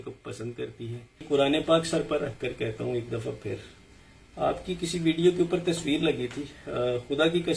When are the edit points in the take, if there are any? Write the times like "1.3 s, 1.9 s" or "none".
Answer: 1.2 s